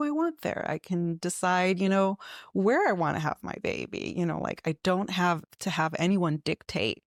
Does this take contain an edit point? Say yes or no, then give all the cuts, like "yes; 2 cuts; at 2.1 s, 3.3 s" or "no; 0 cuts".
no; 0 cuts